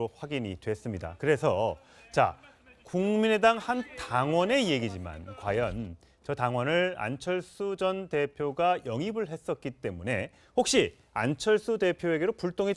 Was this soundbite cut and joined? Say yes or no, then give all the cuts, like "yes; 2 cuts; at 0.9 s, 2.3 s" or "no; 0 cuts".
no; 0 cuts